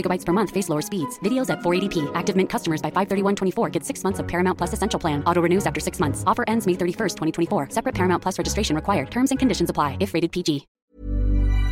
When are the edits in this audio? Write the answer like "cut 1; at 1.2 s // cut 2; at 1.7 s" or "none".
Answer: cut 1; at 10.7 s